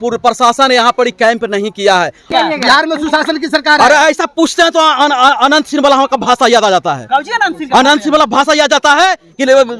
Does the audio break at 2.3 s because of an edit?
yes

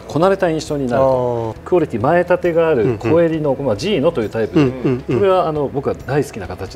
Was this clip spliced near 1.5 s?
yes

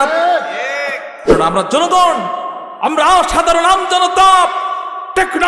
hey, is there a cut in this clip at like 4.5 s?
no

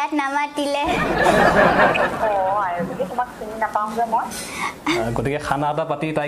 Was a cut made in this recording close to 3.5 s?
no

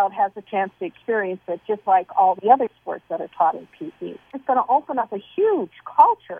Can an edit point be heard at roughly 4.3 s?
yes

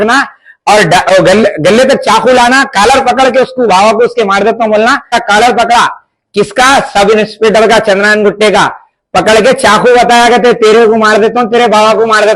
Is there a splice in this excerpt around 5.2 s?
yes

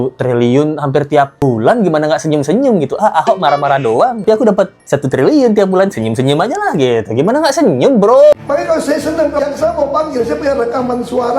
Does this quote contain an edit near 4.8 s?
no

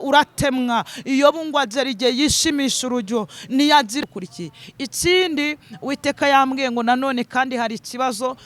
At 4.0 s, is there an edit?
yes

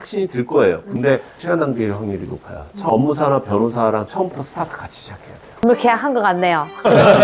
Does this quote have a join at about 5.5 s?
yes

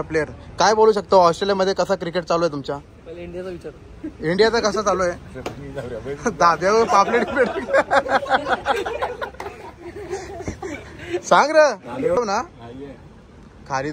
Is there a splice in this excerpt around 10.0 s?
no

